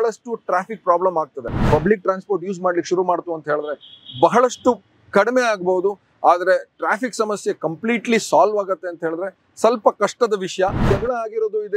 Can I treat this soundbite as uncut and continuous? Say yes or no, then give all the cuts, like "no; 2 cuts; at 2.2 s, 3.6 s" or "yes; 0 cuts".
no; 2 cuts; at 1.6 s, 10.8 s